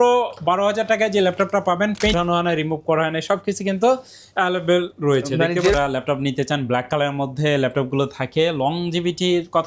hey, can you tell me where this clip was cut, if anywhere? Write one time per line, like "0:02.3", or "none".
0:02.1
0:05.7